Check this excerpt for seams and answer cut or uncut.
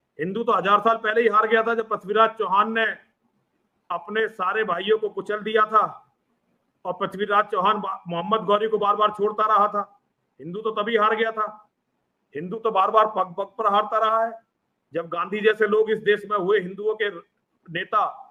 uncut